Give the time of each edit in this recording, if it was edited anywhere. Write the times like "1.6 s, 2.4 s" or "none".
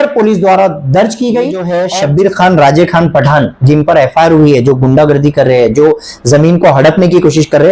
1.8 s